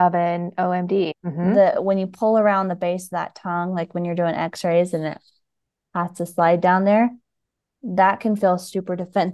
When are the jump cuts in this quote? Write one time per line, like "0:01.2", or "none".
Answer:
0:01.1